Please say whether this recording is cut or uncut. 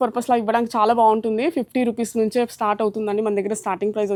uncut